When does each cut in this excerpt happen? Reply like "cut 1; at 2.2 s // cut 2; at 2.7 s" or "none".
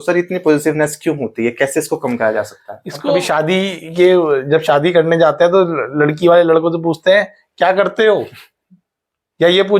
cut 1; at 3.1 s